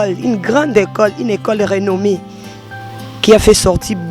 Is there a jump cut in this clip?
no; 0 cuts

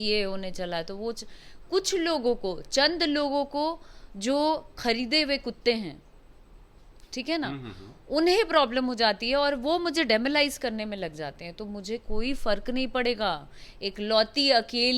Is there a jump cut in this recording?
no; 0 cuts

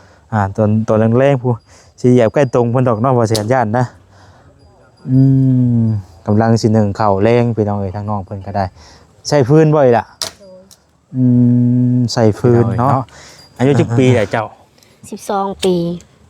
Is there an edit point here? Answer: yes; 1 cut; at 12.9 s

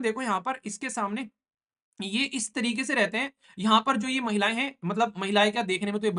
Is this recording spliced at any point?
no; 0 cuts

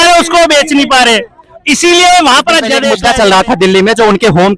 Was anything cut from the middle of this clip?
yes; 1 cut; at 2.9 s

